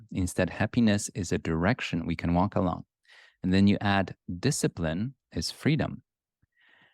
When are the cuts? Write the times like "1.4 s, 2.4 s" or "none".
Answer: none